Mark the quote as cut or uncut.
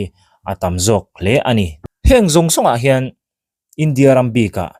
cut